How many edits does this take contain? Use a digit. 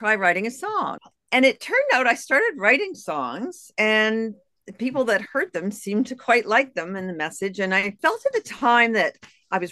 2